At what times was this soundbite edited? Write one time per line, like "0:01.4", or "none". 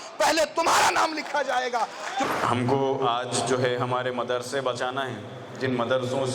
none

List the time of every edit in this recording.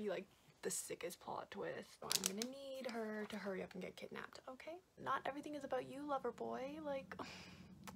0:01.9
0:04.9

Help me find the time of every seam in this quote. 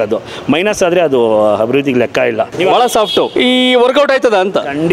0:02.5
0:03.3

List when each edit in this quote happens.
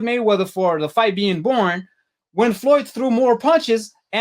none

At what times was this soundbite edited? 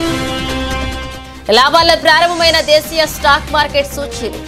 none

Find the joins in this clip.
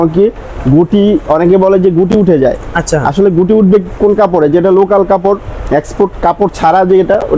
none

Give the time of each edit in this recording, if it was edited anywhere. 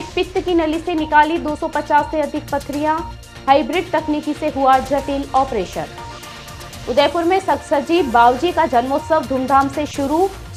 none

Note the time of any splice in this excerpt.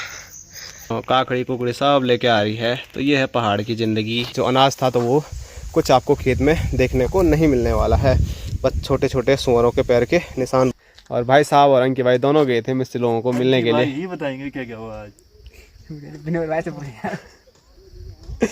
0:00.9
0:04.3
0:10.7

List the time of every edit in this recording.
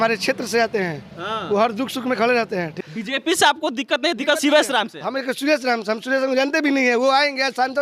0:02.8

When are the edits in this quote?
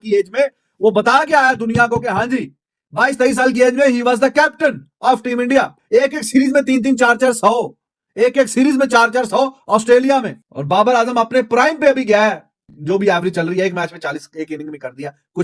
none

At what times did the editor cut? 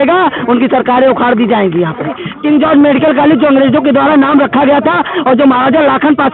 0:02.3

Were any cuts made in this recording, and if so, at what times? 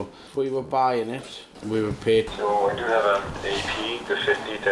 0:01.5
0:02.3

